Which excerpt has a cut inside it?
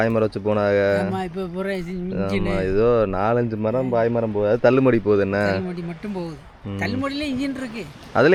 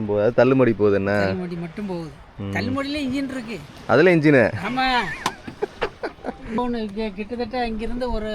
second; 1 cut; at 6.6 s

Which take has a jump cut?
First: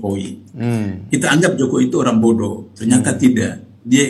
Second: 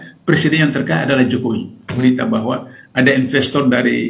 second; 1 cut; at 2.0 s

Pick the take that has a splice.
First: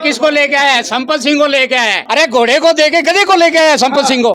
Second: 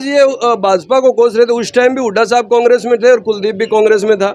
first; 1 cut; at 2.0 s

